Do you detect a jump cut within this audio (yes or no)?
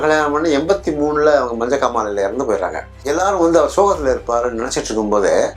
no